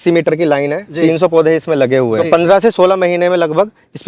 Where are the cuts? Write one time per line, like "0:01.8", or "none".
0:02.2